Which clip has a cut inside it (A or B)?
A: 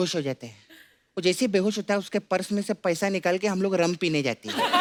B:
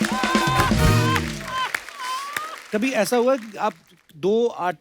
B